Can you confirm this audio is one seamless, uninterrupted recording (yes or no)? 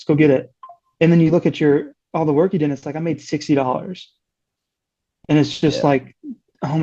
yes